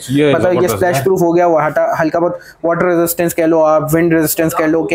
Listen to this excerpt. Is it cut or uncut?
uncut